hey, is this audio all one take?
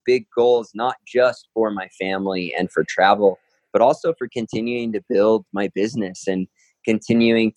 yes; 0 cuts

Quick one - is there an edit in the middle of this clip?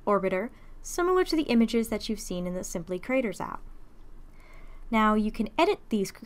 no; 0 cuts

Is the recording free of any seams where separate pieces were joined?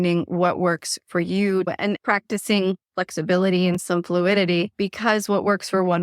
no; 1 cut; at 1.7 s

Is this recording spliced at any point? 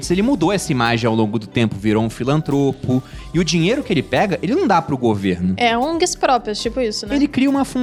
no; 0 cuts

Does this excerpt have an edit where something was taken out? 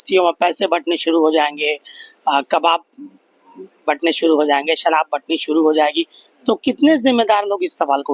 no; 0 cuts

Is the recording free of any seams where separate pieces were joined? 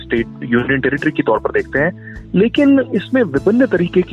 no; 1 cut; at 2.9 s

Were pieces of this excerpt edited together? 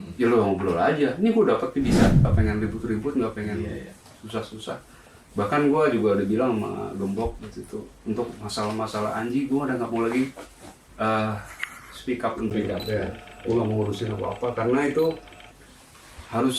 yes; 1 cut; at 2.2 s

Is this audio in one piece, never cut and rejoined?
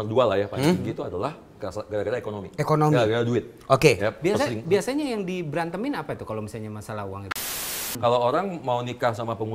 no; 1 cut; at 7.4 s

